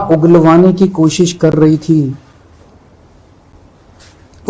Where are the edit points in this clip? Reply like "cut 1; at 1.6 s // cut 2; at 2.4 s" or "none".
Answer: none